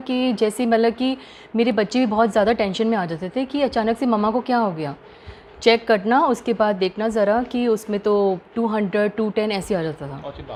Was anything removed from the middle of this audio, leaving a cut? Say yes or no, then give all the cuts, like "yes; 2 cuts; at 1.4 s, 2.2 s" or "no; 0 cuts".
no; 0 cuts